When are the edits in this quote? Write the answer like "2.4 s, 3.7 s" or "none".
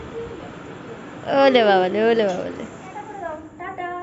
3.1 s